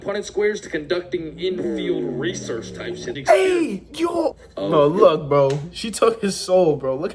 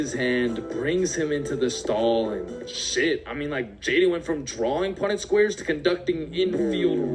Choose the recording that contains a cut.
first; 2 cuts; at 3.1 s, 4.5 s

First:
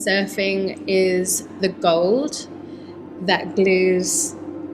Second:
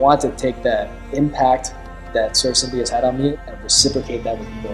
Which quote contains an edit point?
second; 2 cuts; at 1.0 s, 2.1 s

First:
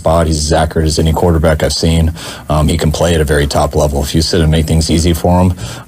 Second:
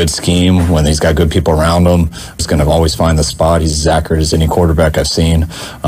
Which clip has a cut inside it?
second; 1 cut; at 2.4 s

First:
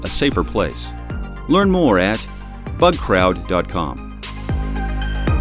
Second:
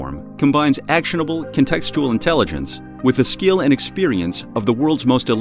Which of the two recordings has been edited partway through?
first; 1 cut; at 4.2 s

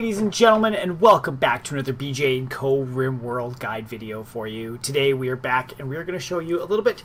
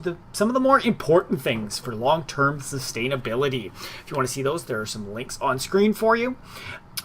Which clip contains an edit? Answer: second; 1 cut; at 2.3 s

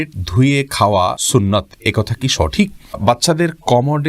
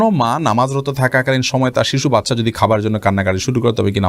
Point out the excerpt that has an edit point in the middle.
first; 2 cuts; at 1.2 s, 3.0 s

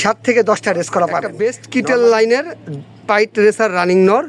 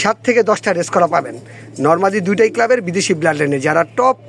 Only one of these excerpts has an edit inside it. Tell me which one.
first; 1 cut; at 1.4 s

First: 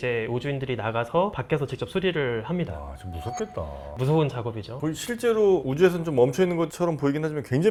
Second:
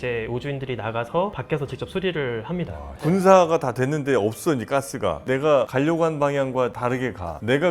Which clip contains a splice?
second; 2 cuts; at 3.0 s, 5.2 s

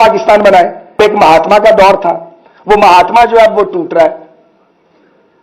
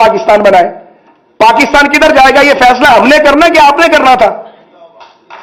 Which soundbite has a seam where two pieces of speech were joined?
first; 1 cut; at 1.0 s

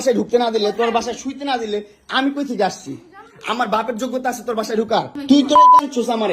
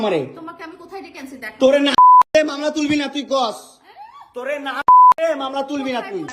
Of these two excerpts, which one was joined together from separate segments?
first; 1 cut; at 5.1 s

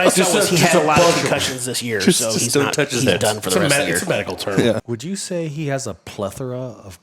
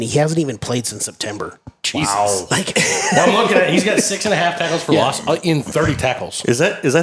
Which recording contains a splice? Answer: first; 1 cut; at 4.9 s

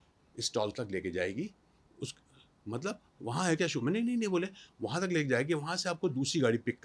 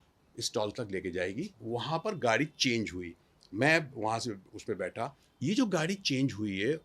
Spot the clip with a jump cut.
second; 2 cuts; at 1.6 s, 5.2 s

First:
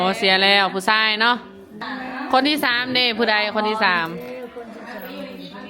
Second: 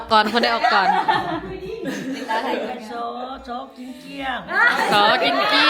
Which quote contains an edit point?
first; 1 cut; at 1.8 s

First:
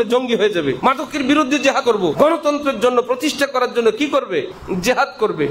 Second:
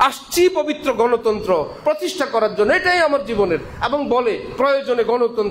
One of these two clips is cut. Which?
first; 3 cuts; at 0.8 s, 1.9 s, 4.6 s

